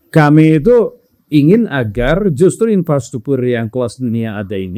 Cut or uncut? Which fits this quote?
uncut